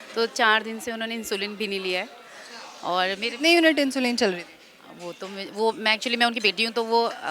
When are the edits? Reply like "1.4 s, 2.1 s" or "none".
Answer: none